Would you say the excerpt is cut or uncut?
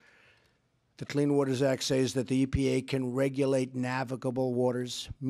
cut